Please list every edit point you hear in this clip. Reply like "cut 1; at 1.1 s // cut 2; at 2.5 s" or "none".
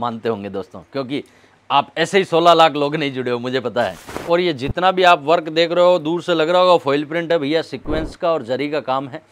cut 1; at 4.1 s